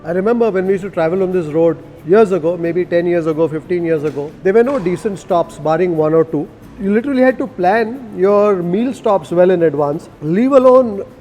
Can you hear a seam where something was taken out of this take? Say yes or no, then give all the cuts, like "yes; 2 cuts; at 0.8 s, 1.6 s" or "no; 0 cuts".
no; 0 cuts